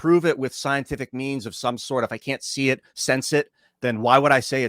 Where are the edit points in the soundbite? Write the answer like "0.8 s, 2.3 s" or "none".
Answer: 3.6 s

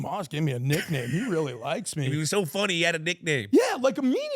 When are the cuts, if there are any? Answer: 2.2 s

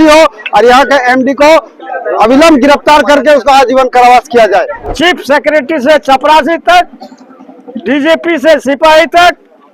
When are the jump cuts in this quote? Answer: 4.8 s

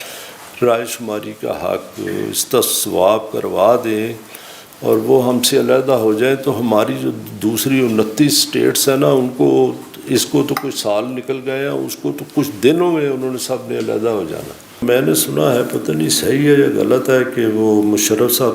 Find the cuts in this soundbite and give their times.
14.8 s

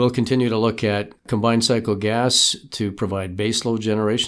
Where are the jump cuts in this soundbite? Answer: 1.2 s

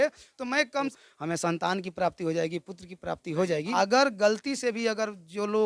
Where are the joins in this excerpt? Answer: 1.0 s, 3.7 s

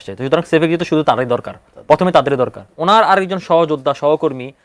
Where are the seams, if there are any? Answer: 2.7 s

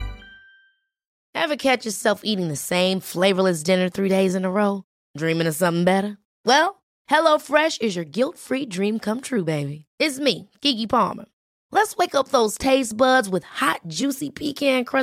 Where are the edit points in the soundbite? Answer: 1.2 s

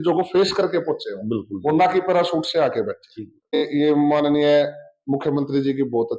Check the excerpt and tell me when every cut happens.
3.7 s

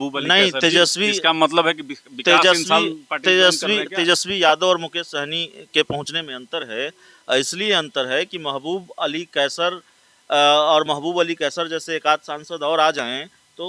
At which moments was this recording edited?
none

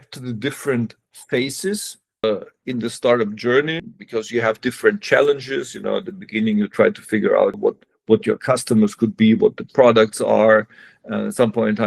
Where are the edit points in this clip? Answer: 2.2 s, 3.9 s, 7.6 s

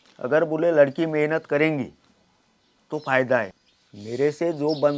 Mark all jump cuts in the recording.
3.5 s

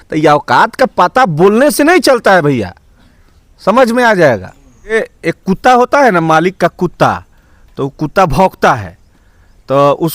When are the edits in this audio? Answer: 4.9 s

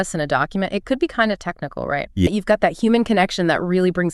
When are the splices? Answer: 2.3 s

